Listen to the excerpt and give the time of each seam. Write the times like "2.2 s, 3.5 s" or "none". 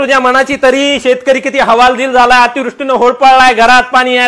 none